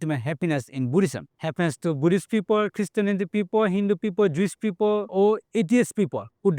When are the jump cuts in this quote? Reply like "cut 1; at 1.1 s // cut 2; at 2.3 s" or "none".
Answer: cut 1; at 1.3 s // cut 2; at 5.1 s